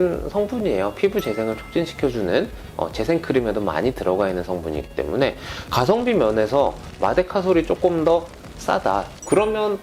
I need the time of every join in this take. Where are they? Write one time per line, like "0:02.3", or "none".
0:05.5